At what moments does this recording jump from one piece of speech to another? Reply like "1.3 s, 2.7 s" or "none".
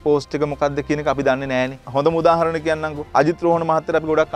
1.8 s